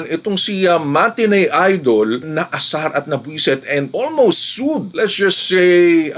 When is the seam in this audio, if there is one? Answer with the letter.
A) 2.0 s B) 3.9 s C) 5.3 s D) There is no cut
D